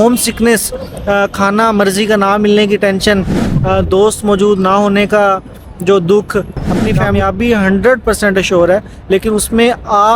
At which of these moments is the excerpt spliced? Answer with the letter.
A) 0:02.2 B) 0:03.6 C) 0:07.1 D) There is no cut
C